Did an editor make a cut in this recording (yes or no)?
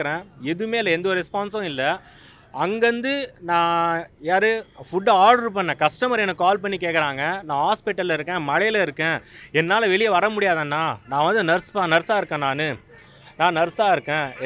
no